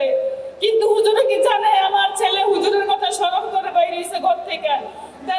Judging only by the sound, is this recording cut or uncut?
uncut